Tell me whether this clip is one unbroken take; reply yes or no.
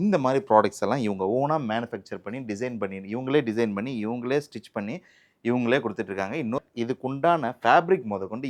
no